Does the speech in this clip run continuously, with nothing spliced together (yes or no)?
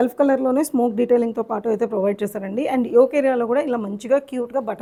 yes